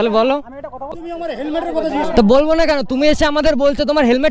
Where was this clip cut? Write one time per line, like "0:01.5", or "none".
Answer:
0:01.0